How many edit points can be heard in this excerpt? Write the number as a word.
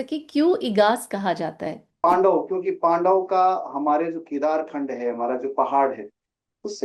one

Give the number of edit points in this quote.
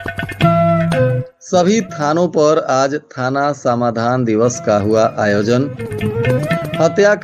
one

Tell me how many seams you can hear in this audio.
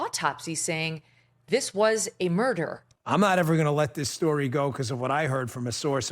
one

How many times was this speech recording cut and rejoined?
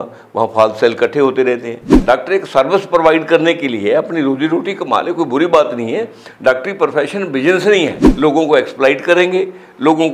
two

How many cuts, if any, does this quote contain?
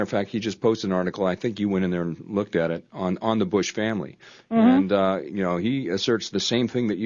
one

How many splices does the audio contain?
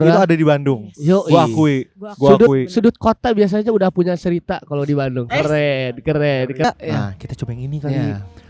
one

